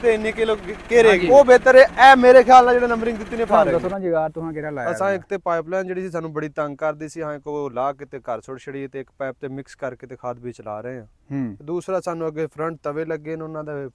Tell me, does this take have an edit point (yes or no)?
yes